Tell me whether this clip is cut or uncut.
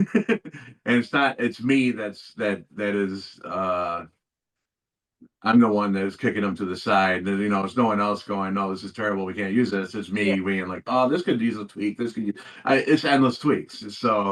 uncut